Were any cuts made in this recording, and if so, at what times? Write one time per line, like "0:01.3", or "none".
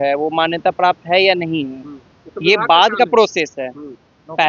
none